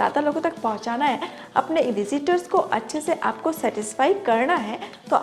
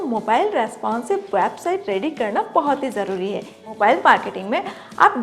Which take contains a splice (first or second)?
second